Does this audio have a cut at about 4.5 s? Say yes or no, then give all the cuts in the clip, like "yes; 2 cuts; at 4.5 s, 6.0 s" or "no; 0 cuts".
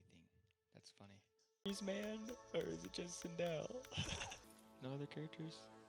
yes; 1 cut; at 4.5 s